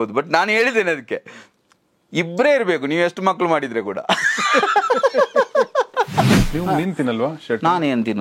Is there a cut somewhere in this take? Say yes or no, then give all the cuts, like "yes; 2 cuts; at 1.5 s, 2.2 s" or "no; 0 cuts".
yes; 1 cut; at 6.4 s